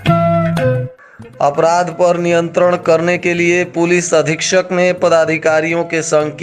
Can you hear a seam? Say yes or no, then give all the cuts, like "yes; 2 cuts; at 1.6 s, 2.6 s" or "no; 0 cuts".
yes; 1 cut; at 1.1 s